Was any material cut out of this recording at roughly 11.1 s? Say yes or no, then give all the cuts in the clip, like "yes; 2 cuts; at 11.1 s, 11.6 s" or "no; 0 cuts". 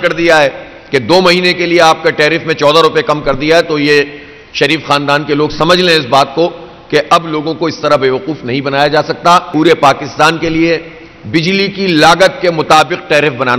no; 1 cut; at 9.5 s